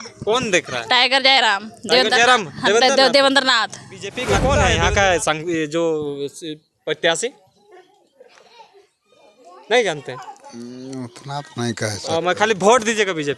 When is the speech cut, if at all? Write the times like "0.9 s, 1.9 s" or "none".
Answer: 4.3 s